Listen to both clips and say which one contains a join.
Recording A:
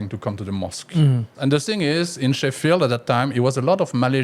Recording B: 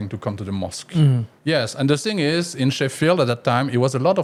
A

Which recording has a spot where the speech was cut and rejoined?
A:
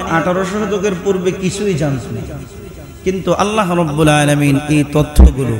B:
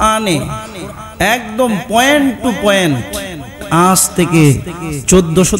B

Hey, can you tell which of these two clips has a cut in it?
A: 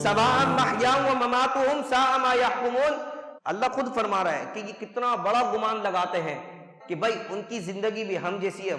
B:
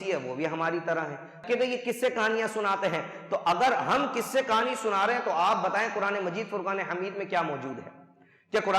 B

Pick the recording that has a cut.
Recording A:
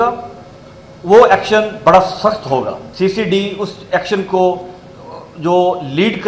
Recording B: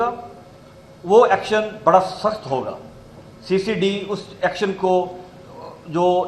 A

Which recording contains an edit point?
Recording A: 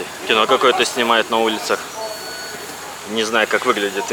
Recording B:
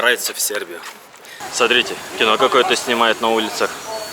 B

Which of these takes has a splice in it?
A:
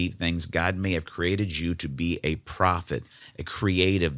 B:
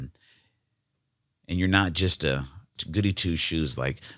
B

